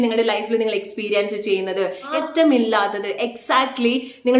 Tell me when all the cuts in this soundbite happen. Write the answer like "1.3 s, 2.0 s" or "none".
2.1 s